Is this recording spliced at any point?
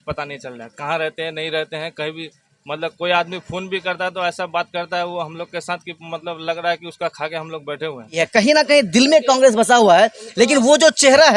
yes; 1 cut; at 8.1 s

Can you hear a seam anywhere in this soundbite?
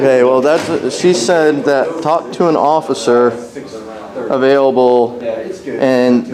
no; 0 cuts

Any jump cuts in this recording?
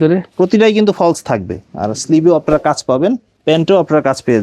yes; 1 cut; at 3.3 s

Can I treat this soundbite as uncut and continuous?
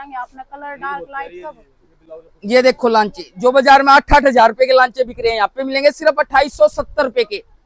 yes; 0 cuts

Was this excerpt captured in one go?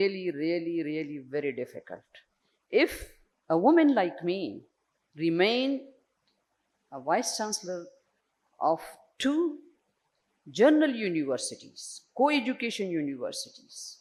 yes; 0 cuts

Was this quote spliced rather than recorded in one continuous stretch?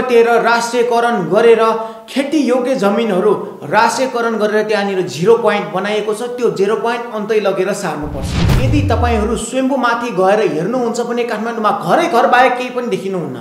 yes; 1 cut; at 8.5 s

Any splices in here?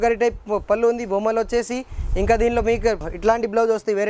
yes; 1 cut; at 3.1 s

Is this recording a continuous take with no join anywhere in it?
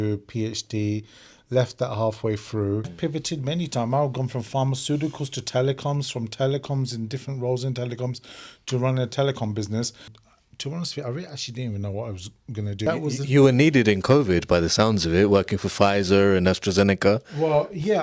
no; 3 cuts; at 2.9 s, 10.2 s, 12.8 s

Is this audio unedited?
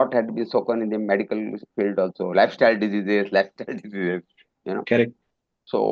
yes; 0 cuts

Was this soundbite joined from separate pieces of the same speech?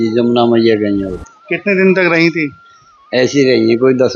no; 0 cuts

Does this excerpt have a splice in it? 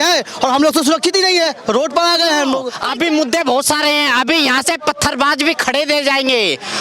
yes; 1 cut; at 2.8 s

